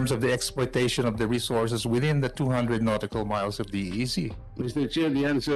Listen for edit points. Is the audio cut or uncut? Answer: cut